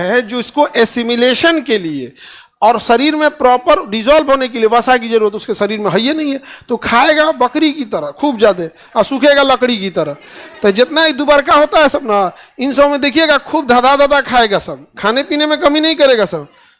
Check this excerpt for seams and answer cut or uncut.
uncut